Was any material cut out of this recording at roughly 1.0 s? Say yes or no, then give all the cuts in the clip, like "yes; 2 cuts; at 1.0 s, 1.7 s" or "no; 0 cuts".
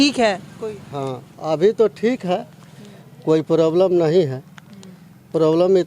no; 0 cuts